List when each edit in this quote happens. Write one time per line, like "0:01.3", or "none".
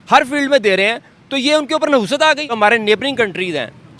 0:02.5